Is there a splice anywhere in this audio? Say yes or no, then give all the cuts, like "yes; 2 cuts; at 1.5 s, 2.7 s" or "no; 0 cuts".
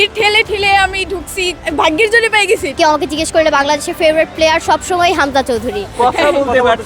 yes; 3 cuts; at 1.6 s, 2.7 s, 5.9 s